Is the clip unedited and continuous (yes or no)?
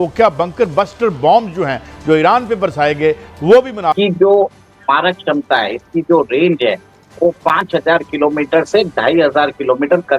no